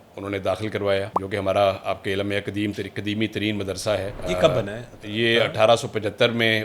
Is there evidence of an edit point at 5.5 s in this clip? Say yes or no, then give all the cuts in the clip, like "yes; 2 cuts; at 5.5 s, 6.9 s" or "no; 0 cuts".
no; 2 cuts; at 1.2 s, 4.1 s